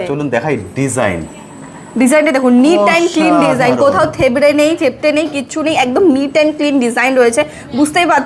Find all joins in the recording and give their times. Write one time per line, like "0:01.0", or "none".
none